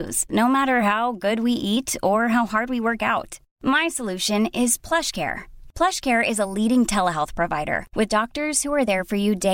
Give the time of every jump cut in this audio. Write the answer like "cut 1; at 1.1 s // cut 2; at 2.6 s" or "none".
none